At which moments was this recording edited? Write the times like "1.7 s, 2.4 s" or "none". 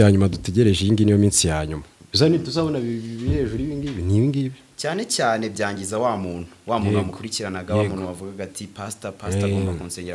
4.7 s